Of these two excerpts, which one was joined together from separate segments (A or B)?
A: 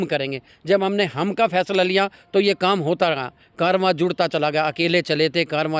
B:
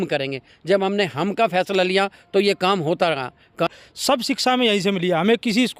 B